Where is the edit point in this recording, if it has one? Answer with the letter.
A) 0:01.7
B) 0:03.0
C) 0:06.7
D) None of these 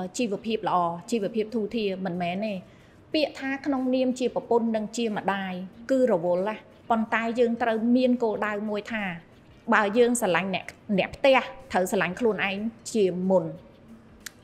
C